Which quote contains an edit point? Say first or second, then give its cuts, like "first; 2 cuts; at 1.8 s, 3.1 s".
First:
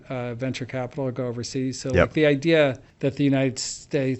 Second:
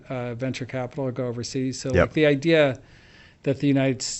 first; 1 cut; at 2.9 s